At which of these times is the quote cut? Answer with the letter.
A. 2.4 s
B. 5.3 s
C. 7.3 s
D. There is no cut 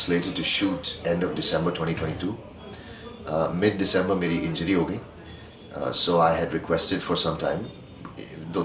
D